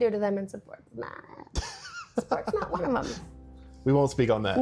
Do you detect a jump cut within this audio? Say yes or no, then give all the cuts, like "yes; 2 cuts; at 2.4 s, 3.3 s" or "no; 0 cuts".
no; 0 cuts